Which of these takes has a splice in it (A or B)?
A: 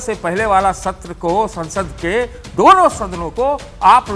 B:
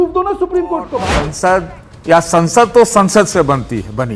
B